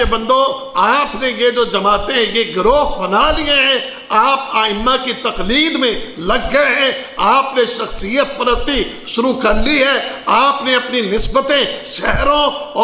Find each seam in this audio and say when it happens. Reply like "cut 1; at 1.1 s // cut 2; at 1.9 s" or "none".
none